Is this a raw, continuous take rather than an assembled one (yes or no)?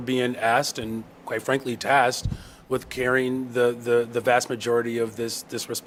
yes